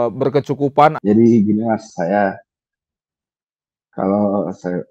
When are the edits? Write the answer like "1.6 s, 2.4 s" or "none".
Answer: 1.0 s